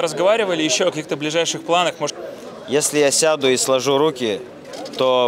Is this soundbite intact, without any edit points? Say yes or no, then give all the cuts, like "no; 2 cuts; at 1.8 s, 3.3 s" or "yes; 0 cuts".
no; 1 cut; at 2.1 s